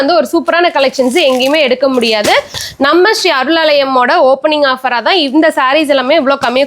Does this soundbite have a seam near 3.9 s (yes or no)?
no